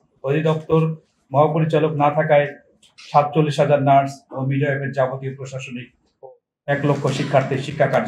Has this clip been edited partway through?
no; 0 cuts

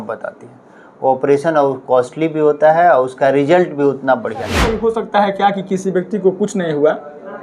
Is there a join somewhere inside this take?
yes; 1 cut; at 4.6 s

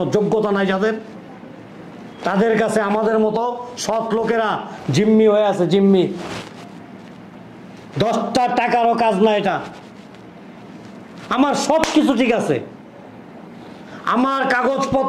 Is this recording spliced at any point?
no; 0 cuts

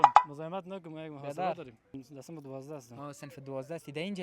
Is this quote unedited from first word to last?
no; 1 cut; at 2.0 s

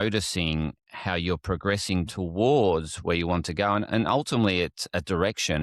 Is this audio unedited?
yes; 0 cuts

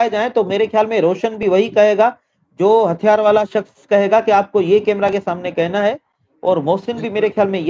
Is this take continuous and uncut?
yes; 0 cuts

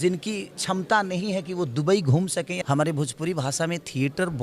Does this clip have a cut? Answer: yes; 1 cut; at 2.5 s

